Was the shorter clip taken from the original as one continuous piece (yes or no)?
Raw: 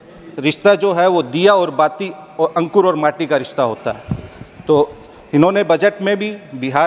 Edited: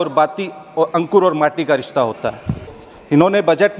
no